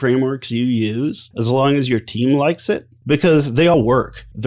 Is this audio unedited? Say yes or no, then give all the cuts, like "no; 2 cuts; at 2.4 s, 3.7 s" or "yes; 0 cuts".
no; 3 cuts; at 1.3 s, 2.9 s, 3.7 s